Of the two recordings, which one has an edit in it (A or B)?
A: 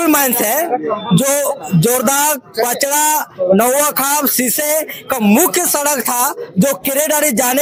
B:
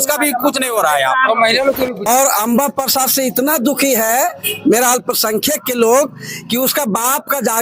B